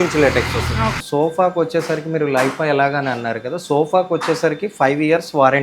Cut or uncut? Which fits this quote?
cut